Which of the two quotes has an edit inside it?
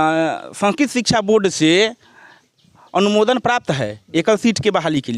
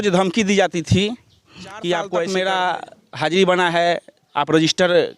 second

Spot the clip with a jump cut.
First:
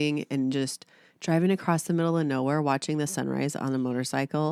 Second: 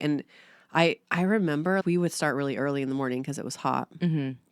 second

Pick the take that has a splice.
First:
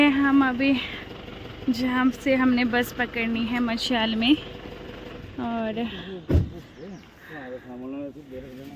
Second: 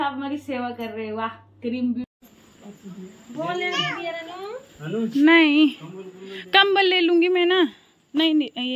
second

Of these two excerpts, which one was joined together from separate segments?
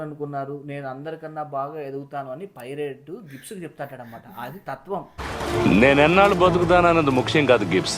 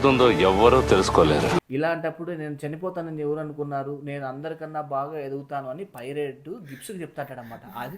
second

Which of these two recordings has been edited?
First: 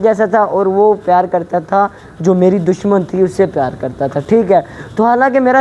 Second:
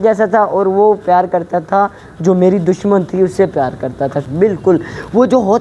second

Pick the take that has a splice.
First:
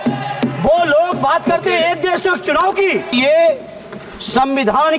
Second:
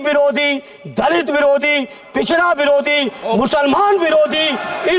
first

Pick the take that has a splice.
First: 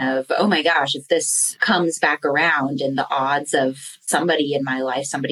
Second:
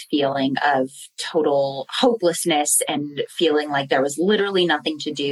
first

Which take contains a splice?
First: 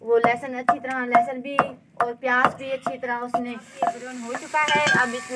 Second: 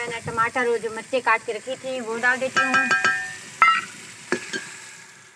first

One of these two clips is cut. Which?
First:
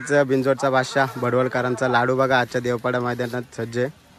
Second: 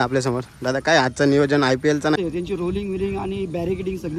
second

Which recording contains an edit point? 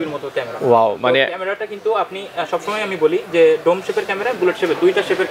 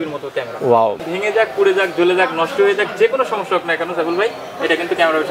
second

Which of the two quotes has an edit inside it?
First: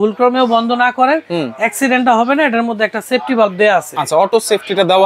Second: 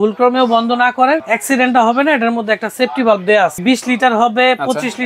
second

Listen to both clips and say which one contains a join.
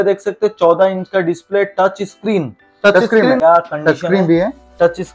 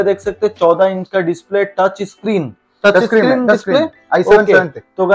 first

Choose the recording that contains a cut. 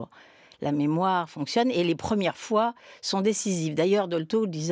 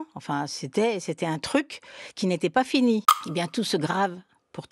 second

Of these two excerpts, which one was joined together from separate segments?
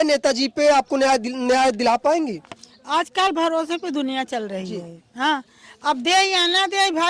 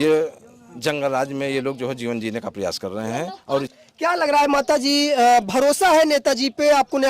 second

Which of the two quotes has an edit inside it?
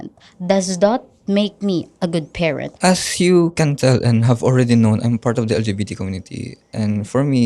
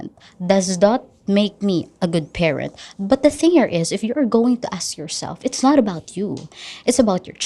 first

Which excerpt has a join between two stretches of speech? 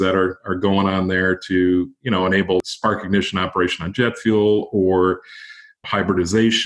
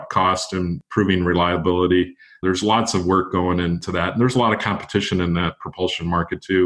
second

